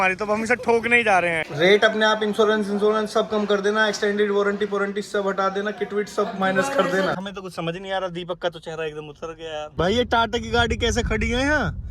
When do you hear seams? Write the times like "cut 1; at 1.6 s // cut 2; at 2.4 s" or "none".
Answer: cut 1; at 1.4 s // cut 2; at 7.1 s // cut 3; at 9.6 s